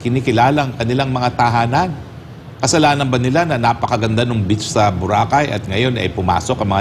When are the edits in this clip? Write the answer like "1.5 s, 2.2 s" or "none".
none